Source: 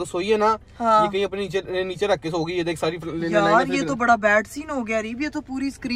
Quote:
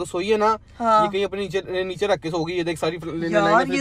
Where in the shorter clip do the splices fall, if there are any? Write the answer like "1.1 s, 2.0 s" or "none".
none